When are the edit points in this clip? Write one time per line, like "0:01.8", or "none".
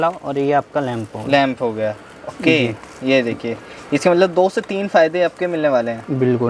none